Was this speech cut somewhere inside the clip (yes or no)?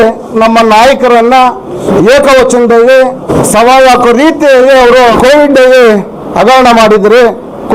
yes